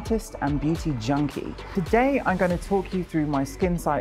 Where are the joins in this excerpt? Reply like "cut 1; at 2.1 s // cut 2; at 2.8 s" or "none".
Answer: cut 1; at 1.6 s